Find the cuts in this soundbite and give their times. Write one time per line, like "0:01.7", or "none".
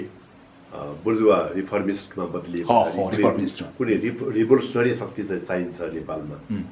none